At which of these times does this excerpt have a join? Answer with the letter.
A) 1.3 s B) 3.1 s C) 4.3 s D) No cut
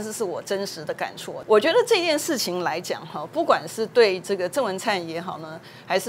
A